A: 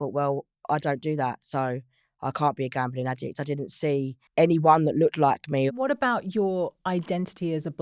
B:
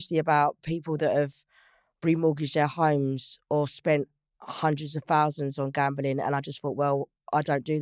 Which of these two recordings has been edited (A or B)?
A